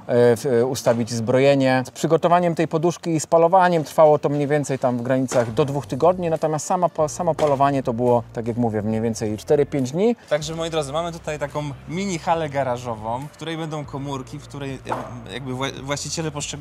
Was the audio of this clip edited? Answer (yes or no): yes